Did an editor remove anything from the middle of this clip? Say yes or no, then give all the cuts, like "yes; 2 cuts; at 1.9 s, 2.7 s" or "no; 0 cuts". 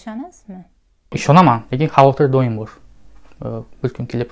yes; 1 cut; at 1.2 s